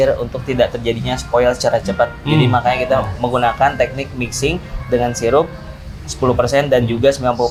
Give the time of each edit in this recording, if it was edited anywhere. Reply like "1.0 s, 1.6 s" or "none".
none